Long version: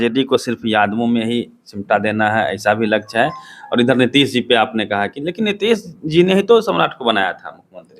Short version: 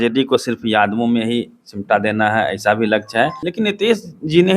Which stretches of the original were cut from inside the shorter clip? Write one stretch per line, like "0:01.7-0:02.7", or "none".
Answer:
0:03.4-0:05.2

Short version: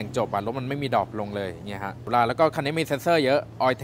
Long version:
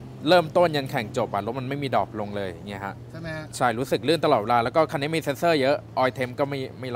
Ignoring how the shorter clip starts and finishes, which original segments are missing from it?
0:03.1-0:04.4

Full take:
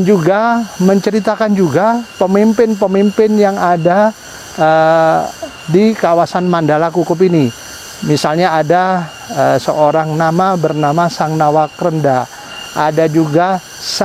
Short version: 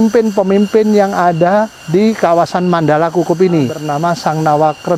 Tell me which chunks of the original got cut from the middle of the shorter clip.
0:04.2-0:05.6
0:07.6-0:10.8

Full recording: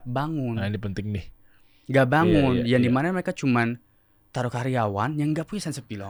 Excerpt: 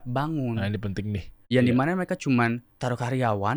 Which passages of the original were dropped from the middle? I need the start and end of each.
0:01.5-0:02.6
0:03.9-0:04.2

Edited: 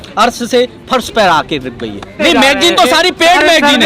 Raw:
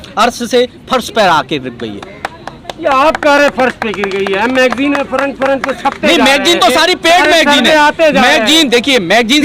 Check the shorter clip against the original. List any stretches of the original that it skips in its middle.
0:02.1-0:06.0

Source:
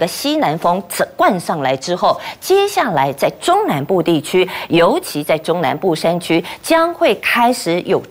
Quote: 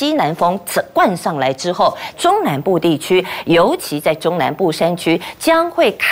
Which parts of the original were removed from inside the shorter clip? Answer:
0:02.4-0:03.4

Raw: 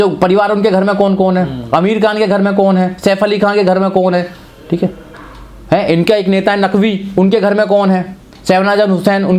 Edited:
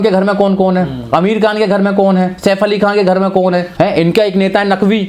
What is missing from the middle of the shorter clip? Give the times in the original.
0:04.3-0:05.6

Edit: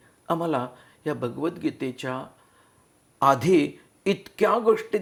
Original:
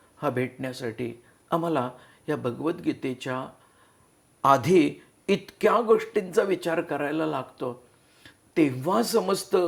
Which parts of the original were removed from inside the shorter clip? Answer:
none

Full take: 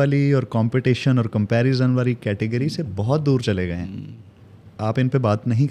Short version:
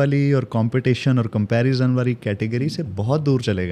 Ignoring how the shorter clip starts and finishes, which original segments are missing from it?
none

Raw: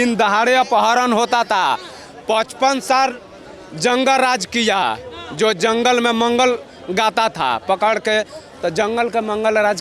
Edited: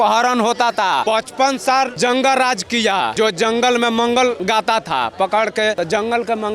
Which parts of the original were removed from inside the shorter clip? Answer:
0:01.8-0:02.3
0:03.2-0:03.8
0:04.9-0:05.3
0:06.6-0:06.9
0:08.3-0:08.6

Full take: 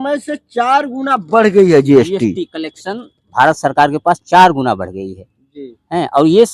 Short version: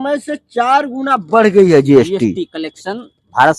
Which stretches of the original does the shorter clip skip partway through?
none

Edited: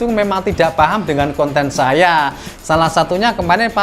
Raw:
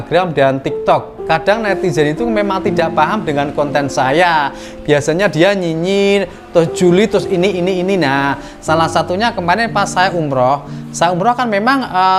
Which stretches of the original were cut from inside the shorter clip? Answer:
0:04.7-0:08.5

